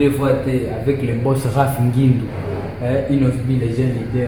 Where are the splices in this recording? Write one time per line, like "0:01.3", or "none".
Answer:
none